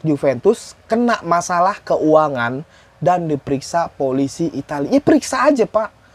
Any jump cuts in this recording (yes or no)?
no